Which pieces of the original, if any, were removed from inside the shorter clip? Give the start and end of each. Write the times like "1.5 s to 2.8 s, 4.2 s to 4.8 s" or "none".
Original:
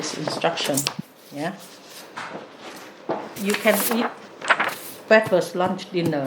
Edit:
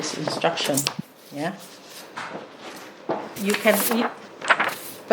none